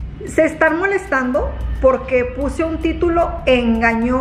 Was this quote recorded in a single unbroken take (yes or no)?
yes